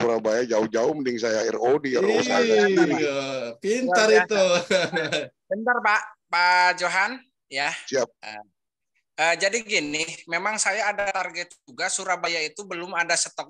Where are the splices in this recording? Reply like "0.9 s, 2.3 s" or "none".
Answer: none